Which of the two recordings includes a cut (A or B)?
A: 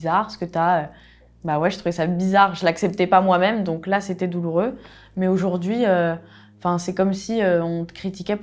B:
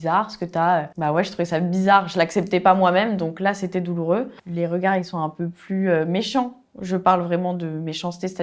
B